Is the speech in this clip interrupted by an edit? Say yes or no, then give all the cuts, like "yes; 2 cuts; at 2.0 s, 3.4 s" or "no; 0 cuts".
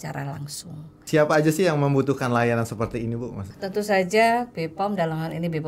yes; 2 cuts; at 1.0 s, 3.5 s